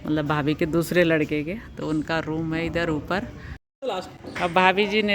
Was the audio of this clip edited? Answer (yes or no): yes